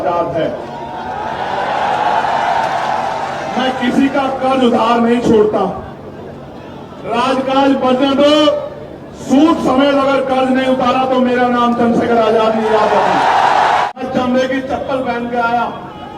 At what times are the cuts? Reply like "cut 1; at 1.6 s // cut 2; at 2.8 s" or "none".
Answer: cut 1; at 13.8 s

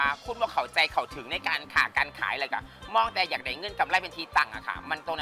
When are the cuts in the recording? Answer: none

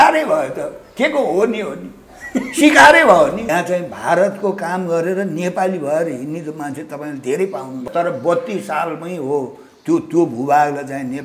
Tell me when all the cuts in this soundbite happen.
cut 1; at 3.4 s // cut 2; at 7.8 s

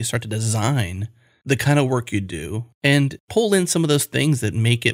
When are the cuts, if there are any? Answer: cut 1; at 1.3 s // cut 2; at 2.8 s

